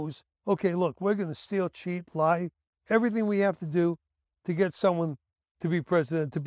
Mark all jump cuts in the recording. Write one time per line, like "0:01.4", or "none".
none

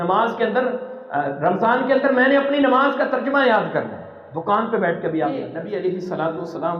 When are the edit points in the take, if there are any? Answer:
0:05.6

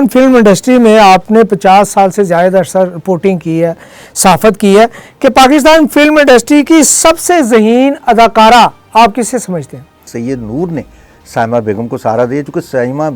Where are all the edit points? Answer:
0:10.1

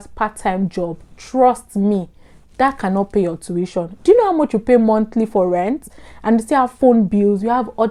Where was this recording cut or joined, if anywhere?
none

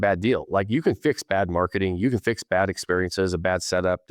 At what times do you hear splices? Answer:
none

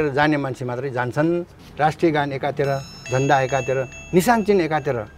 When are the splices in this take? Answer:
0:01.7

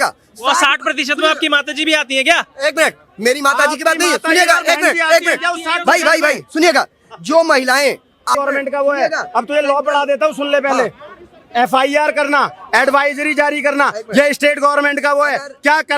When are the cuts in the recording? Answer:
0:08.4

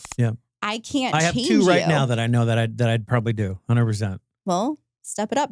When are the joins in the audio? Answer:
none

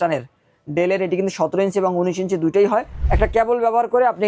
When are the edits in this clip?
0:03.0

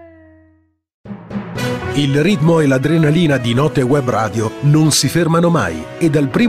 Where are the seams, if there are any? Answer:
0:00.9

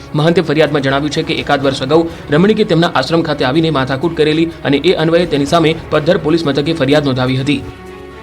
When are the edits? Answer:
0:05.8

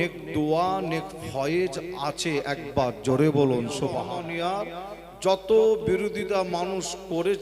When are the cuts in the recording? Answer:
0:04.0

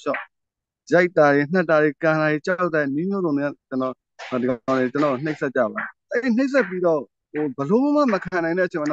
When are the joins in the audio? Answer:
0:06.0

